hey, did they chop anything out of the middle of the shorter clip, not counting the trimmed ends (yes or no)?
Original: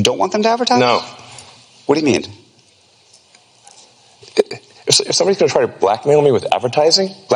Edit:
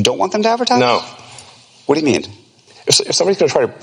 yes